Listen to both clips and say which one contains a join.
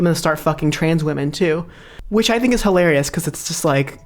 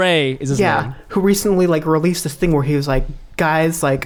first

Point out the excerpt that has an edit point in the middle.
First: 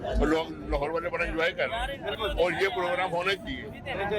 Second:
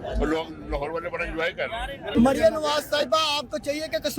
second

